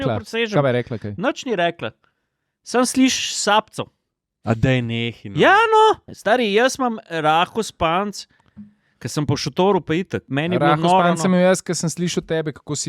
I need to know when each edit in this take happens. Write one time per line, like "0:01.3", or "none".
0:06.1
0:10.3